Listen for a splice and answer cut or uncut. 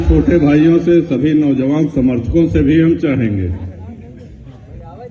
uncut